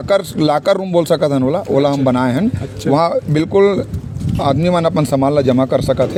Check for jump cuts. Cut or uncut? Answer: uncut